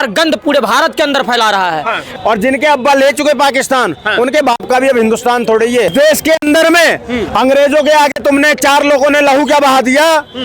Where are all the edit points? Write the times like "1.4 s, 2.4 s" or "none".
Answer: 2.1 s, 5.9 s